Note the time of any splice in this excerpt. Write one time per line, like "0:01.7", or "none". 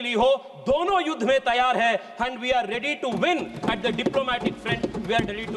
none